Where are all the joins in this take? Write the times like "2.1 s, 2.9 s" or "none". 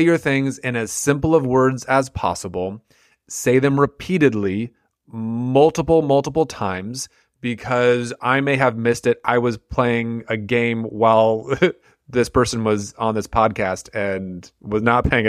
none